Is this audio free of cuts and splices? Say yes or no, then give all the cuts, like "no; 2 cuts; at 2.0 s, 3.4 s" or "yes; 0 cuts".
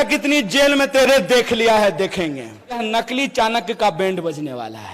no; 1 cut; at 2.8 s